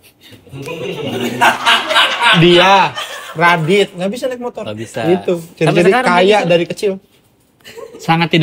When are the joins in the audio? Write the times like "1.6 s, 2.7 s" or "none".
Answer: none